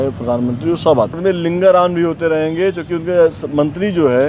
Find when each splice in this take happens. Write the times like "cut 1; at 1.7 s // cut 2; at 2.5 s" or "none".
cut 1; at 1.2 s